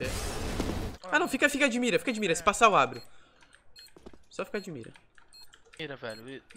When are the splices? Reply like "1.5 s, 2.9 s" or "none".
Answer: 0.9 s